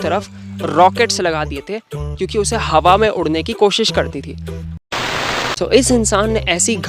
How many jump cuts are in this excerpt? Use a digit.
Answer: 1